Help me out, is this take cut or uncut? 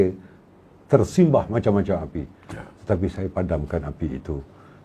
uncut